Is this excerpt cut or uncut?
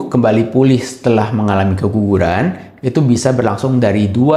uncut